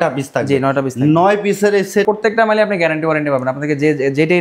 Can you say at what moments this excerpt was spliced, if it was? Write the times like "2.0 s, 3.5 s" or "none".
2.1 s